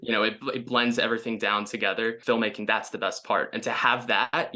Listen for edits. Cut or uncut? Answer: cut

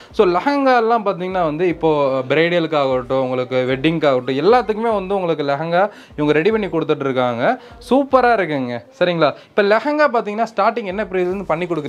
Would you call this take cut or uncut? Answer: uncut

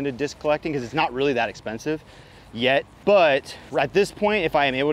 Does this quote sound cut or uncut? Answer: cut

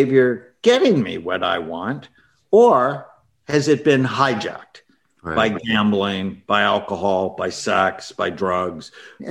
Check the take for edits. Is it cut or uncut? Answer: uncut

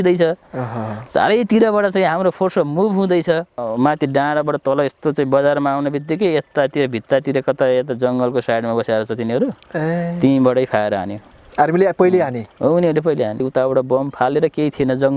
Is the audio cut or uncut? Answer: cut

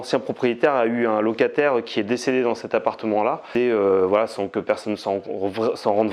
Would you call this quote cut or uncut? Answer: cut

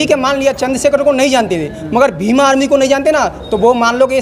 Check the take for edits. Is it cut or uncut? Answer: uncut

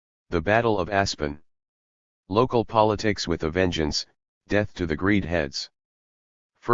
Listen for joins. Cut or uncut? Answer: uncut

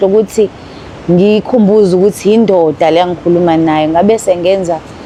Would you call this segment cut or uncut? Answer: uncut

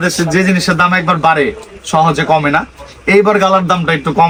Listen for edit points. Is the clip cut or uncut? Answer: uncut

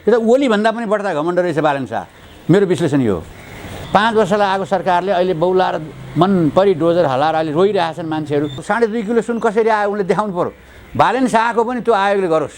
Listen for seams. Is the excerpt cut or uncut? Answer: cut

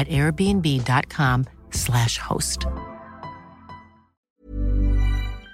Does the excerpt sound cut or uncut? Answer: cut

